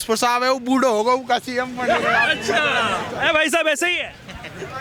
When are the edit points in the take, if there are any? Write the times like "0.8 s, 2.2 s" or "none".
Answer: none